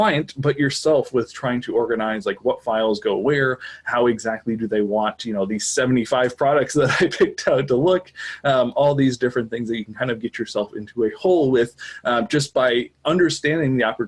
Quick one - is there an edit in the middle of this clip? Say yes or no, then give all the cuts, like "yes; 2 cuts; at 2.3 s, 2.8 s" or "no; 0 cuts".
no; 0 cuts